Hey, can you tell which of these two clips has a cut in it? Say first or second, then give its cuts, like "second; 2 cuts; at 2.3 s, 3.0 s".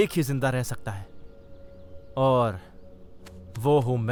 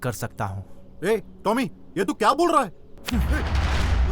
second; 1 cut; at 2.9 s